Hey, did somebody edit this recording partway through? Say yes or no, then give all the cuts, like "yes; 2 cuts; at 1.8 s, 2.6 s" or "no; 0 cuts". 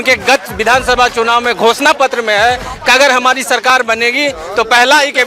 no; 0 cuts